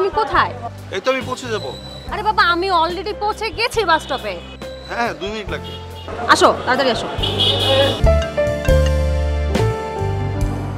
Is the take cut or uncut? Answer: cut